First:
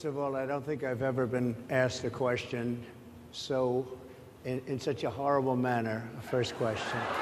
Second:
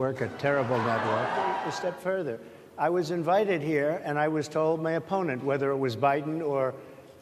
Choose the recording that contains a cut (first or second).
second